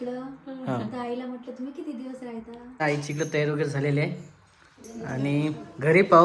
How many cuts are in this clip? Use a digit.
1